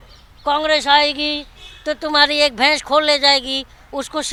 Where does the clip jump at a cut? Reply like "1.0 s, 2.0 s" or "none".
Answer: none